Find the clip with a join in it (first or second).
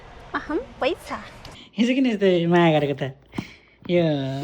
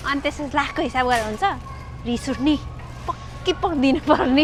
first